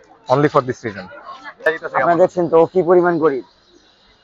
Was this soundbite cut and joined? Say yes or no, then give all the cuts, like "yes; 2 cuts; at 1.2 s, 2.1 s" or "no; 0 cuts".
yes; 1 cut; at 1.7 s